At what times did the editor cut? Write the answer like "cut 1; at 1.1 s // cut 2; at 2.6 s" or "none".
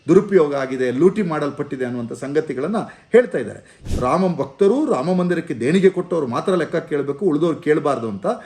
cut 1; at 3.8 s